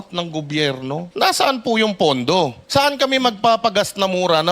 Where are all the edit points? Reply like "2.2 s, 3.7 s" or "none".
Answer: 1.1 s, 2.6 s